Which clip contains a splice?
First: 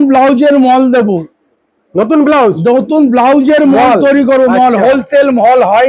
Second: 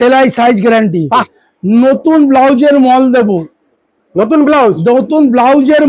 second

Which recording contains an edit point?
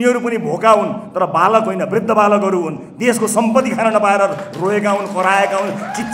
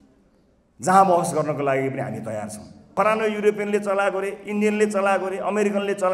second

